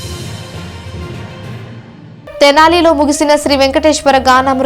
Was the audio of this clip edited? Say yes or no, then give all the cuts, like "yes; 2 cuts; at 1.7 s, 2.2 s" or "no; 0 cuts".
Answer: yes; 1 cut; at 1.7 s